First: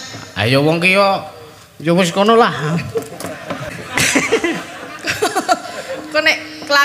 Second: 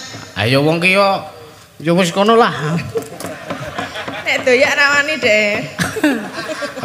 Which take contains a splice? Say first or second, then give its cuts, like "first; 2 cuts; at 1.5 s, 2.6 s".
first; 1 cut; at 3.7 s